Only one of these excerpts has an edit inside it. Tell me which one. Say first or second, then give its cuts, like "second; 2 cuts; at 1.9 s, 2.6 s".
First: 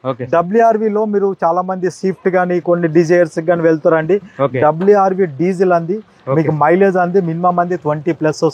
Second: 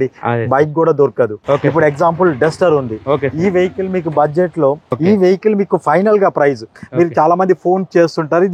second; 2 cuts; at 1.4 s, 4.9 s